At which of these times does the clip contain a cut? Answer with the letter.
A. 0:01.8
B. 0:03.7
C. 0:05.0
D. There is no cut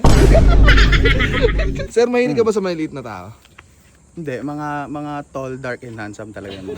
A